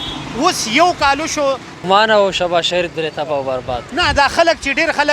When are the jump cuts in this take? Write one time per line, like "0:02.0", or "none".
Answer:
0:01.8